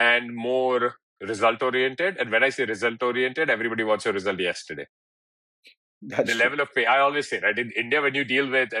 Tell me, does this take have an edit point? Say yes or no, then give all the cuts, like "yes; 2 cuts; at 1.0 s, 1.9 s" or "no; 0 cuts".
no; 0 cuts